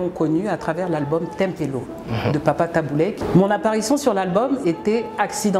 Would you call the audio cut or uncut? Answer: cut